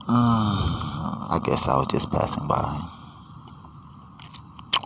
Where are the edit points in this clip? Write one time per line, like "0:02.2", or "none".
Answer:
0:01.2